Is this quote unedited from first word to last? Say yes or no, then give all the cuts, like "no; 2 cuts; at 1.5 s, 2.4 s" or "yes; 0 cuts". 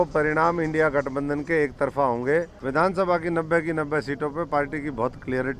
no; 1 cut; at 2.6 s